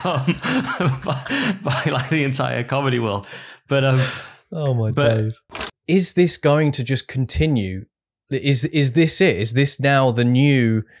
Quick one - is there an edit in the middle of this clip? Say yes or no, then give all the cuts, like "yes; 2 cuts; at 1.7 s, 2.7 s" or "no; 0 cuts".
yes; 1 cut; at 5.4 s